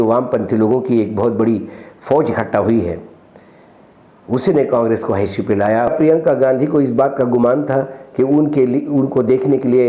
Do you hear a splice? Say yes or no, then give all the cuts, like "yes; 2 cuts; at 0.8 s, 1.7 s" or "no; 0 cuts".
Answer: yes; 1 cut; at 5.9 s